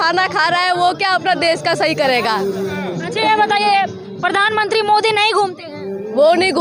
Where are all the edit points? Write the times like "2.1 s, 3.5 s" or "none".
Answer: none